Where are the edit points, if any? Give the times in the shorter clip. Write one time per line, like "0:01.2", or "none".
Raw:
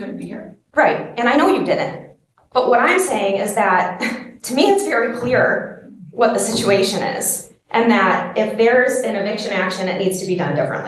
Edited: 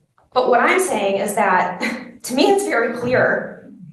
none